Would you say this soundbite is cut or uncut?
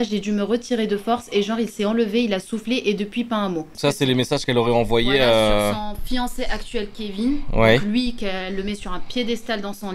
uncut